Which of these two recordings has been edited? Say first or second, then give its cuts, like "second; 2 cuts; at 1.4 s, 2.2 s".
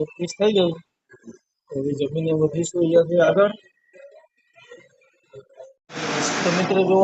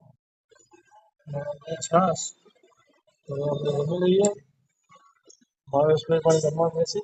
first; 1 cut; at 5.8 s